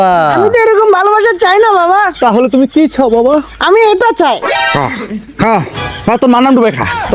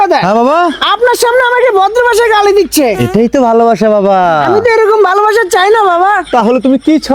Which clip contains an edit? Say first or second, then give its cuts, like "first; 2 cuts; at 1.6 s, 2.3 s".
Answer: first; 1 cut; at 4.4 s